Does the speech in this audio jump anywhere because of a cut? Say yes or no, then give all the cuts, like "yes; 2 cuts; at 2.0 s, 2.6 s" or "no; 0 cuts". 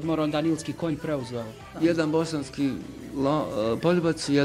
yes; 1 cut; at 1.7 s